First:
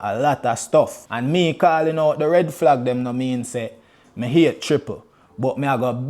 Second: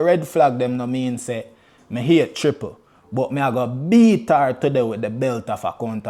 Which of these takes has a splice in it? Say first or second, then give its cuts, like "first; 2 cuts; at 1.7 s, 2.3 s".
first; 1 cut; at 1.0 s